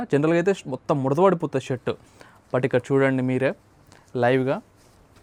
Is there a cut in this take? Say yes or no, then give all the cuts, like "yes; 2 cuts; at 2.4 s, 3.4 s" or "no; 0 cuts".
no; 0 cuts